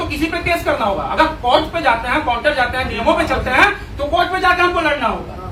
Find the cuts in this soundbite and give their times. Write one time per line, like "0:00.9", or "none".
none